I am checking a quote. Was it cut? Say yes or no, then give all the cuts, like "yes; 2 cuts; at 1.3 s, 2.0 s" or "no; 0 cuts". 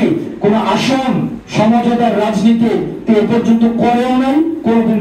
no; 0 cuts